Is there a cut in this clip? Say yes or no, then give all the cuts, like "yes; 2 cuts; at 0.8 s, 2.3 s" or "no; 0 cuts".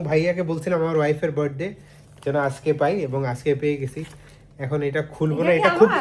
no; 0 cuts